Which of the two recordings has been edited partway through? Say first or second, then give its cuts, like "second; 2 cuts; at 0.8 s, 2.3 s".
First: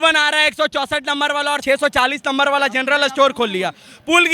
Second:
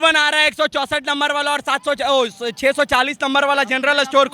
first; 1 cut; at 1.6 s